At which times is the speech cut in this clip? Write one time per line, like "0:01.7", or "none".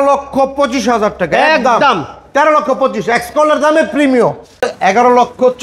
0:04.6